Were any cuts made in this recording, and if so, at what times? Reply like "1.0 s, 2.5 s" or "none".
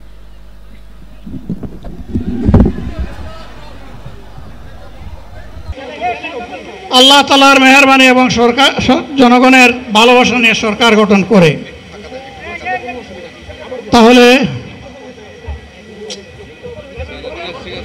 5.7 s